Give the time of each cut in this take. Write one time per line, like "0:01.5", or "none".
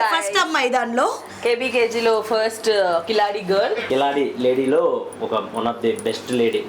0:03.8